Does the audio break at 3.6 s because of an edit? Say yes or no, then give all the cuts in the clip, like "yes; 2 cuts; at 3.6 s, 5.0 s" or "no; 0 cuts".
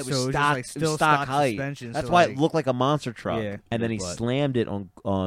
yes; 1 cut; at 3.6 s